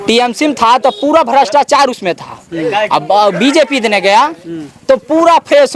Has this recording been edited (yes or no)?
no